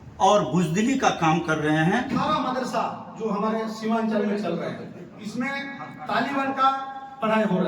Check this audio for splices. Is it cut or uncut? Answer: cut